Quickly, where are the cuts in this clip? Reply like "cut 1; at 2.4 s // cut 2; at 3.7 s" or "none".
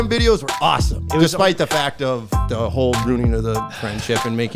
cut 1; at 1.0 s // cut 2; at 2.4 s